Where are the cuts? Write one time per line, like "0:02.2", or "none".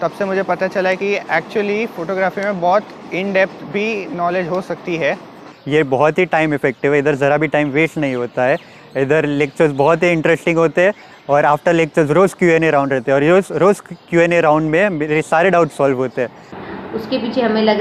0:05.5
0:16.4